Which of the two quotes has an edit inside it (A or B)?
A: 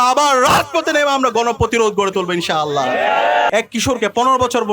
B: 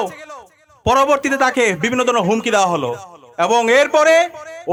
A